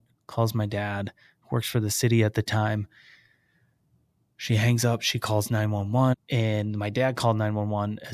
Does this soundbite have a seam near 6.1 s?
yes; 1 cut; at 6.1 s

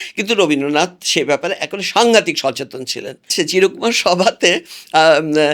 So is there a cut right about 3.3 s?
yes; 1 cut; at 3.3 s

